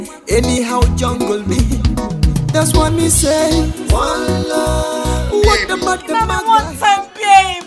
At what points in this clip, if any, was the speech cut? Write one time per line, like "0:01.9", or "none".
0:06.1